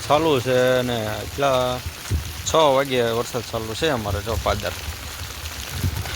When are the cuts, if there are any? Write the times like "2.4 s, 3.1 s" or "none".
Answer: none